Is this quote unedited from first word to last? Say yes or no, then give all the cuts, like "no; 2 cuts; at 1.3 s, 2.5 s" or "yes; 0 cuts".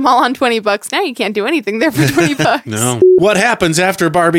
no; 1 cut; at 3.1 s